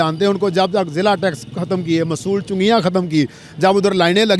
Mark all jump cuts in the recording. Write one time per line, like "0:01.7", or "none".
none